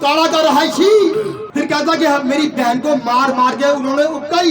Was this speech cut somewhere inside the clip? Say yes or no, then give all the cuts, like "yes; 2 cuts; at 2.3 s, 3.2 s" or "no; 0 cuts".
yes; 1 cut; at 1.4 s